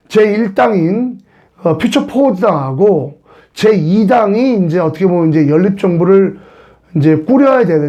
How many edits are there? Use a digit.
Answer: 0